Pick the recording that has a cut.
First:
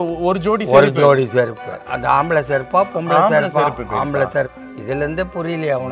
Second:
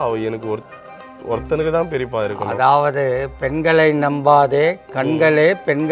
first; 2 cuts; at 1.8 s, 4.6 s

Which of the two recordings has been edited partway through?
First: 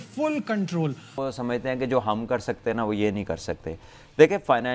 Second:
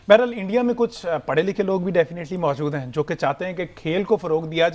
first; 1 cut; at 1.2 s

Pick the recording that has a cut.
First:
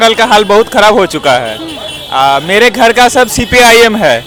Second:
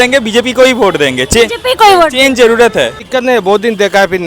second; 1 cut; at 3.0 s

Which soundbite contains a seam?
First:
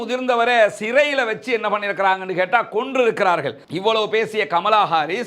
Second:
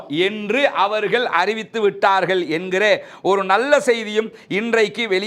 first; 1 cut; at 3.6 s

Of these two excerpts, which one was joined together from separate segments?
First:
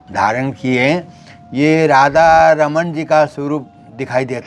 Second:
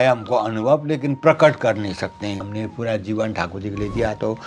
second; 1 cut; at 2.4 s

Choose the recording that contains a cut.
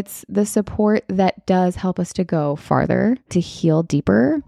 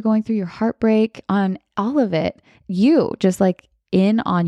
first; 1 cut; at 3.3 s

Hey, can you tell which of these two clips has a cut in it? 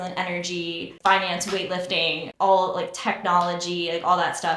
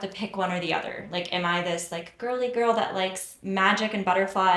first; 2 cuts; at 0.9 s, 2.3 s

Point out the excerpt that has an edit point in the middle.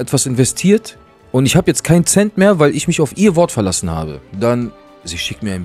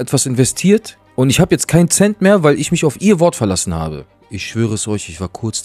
second; 2 cuts; at 1.0 s, 4.1 s

